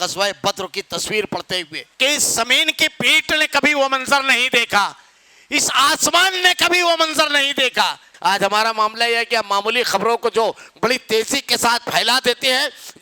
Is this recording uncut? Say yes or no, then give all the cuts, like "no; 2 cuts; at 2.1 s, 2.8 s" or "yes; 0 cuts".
no; 2 cuts; at 1.8 s, 8.1 s